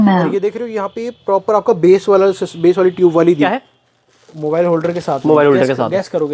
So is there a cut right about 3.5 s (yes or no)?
yes